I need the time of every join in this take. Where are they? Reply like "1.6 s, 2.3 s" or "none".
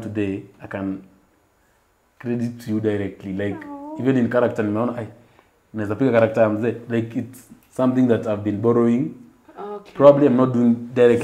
none

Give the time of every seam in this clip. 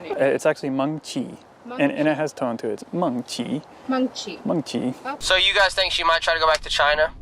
5.1 s

